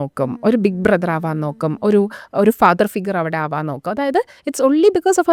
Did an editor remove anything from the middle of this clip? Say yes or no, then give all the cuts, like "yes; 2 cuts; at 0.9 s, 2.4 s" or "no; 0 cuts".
no; 0 cuts